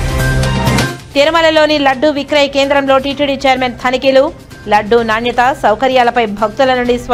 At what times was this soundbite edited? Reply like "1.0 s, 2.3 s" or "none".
none